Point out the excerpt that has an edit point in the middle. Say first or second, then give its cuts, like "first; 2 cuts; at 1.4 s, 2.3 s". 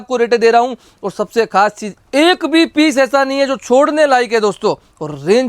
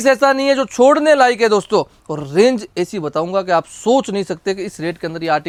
first; 1 cut; at 1.9 s